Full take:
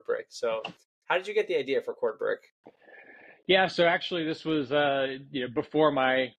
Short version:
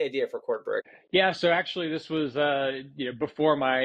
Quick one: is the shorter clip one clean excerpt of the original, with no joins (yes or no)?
no